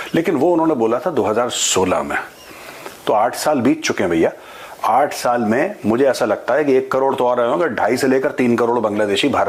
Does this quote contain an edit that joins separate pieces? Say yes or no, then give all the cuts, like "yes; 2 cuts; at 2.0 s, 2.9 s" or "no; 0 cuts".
no; 0 cuts